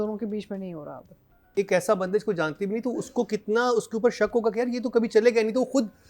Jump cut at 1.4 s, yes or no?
yes